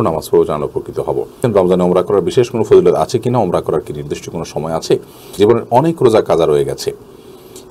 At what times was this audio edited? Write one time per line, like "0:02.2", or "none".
0:01.3
0:05.2